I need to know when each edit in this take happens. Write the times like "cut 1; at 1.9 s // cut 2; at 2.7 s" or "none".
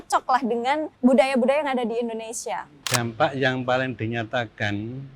cut 1; at 0.9 s // cut 2; at 2.7 s